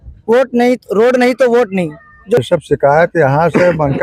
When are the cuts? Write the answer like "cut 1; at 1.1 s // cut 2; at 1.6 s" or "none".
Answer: cut 1; at 2.4 s

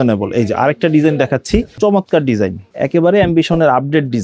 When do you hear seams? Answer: cut 1; at 1.7 s // cut 2; at 2.6 s

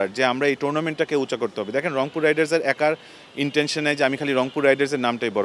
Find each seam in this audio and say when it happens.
none

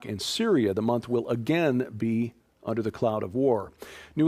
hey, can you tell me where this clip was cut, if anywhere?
none

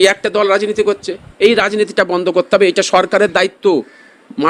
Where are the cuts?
none

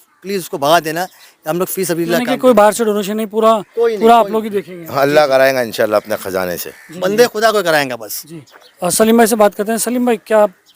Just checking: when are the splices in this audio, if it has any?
none

